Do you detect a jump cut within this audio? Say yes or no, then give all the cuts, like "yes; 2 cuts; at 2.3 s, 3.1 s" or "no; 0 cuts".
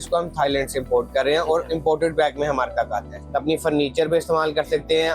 yes; 1 cut; at 3.1 s